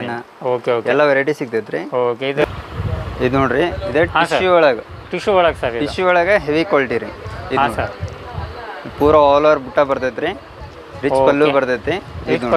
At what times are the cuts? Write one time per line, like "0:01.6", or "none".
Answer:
0:02.4